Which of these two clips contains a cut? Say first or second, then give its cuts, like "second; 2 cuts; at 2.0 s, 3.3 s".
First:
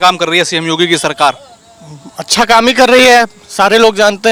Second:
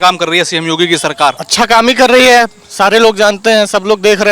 second; 1 cut; at 1.4 s